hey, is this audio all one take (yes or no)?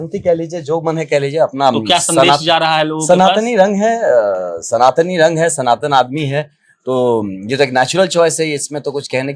yes